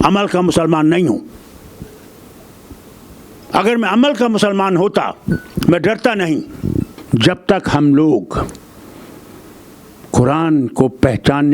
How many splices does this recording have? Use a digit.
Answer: 1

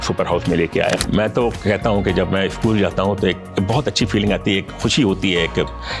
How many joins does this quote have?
1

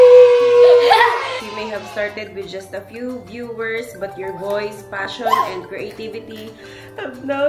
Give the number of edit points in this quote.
1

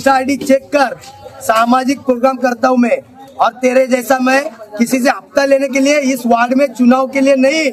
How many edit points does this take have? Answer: 0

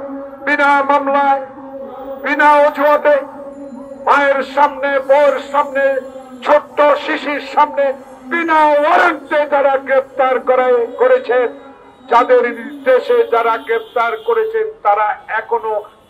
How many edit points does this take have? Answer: 0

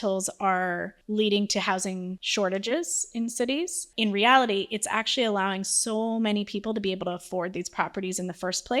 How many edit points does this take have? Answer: 3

